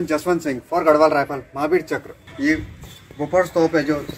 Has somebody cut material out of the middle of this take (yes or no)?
yes